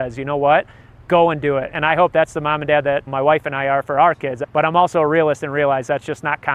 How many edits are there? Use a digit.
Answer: 2